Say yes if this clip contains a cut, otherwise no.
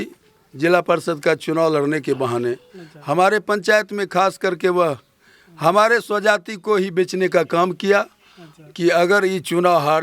no